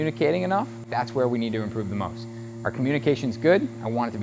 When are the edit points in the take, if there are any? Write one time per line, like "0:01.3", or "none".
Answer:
0:00.9